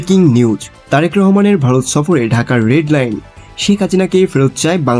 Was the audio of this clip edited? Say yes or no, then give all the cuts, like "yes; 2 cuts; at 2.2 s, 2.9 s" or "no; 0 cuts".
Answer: no; 0 cuts